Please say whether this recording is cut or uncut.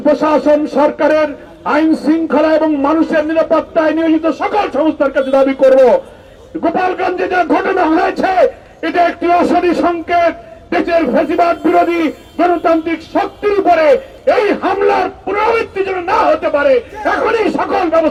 uncut